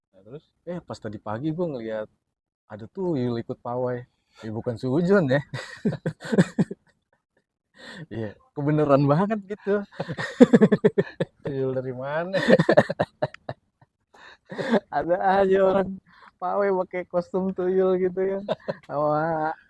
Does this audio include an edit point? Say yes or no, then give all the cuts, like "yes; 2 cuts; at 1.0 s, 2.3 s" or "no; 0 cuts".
no; 0 cuts